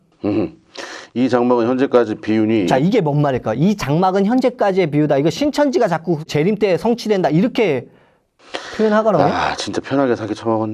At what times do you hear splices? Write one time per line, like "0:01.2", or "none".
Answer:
0:06.3